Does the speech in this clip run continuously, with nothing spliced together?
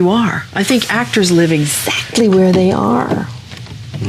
yes; 0 cuts

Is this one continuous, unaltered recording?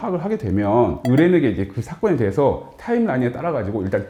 yes; 0 cuts

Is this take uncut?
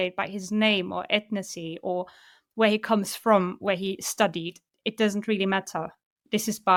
yes; 0 cuts

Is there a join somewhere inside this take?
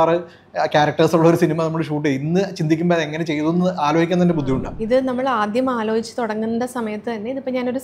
yes; 1 cut; at 4.7 s

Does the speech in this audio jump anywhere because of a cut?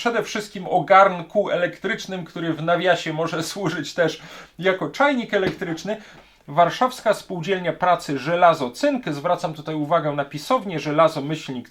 yes; 1 cut; at 6.1 s

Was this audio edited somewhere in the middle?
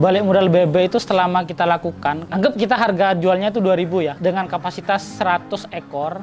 yes; 2 cuts; at 2.2 s, 4.2 s

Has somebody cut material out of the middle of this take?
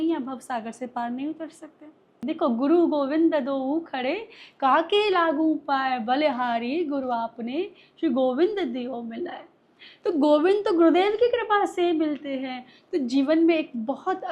yes; 1 cut; at 2.2 s

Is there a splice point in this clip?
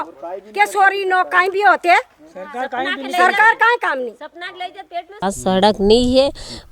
yes; 1 cut; at 5.2 s

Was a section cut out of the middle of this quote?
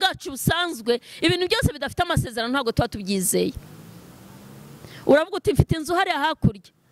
no; 0 cuts

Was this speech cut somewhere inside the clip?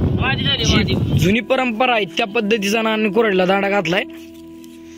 yes; 1 cut; at 1.2 s

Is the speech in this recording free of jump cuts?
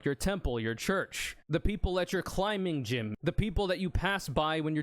no; 1 cut; at 3.1 s

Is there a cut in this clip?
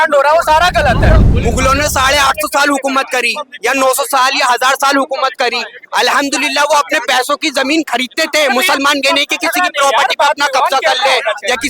yes; 1 cut; at 1.3 s

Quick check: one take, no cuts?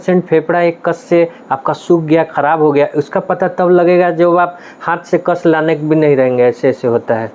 yes; 0 cuts

